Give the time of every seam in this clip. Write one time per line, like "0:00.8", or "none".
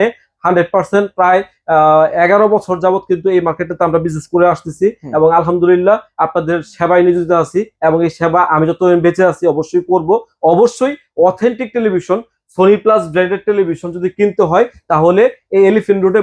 none